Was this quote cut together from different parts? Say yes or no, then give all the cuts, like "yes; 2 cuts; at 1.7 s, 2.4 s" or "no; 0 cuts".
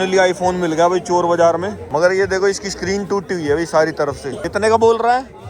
no; 0 cuts